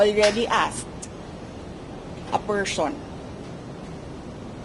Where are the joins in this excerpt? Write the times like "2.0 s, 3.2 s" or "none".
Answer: none